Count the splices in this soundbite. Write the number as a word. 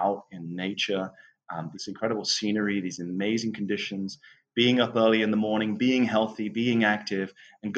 one